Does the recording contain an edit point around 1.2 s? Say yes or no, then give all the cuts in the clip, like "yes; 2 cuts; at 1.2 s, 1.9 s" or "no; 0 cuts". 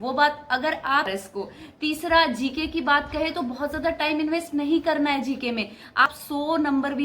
yes; 2 cuts; at 1.2 s, 6.0 s